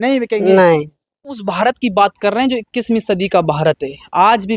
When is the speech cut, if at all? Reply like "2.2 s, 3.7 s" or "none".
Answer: 1.5 s